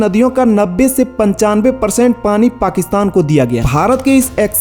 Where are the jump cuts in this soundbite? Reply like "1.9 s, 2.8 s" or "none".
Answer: 3.7 s